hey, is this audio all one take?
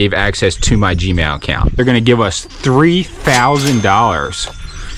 no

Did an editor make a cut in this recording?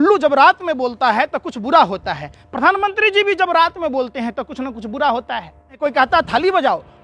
yes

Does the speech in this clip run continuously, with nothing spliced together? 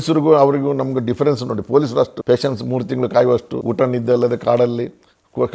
no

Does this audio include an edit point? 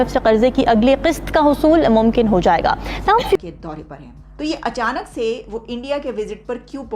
yes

